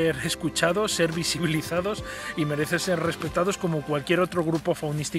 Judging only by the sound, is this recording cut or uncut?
uncut